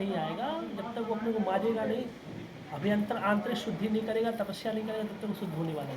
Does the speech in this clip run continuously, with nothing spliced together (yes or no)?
yes